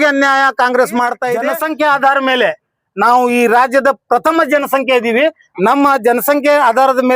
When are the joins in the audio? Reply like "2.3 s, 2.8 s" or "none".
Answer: 1.3 s